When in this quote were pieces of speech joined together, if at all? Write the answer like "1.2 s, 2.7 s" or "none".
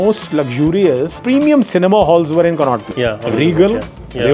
1.1 s, 3.2 s